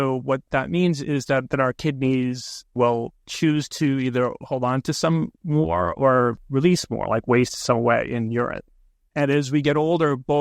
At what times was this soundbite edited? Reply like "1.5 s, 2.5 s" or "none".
2.9 s, 6.4 s